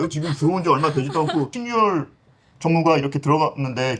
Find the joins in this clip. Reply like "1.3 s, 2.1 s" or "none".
1.6 s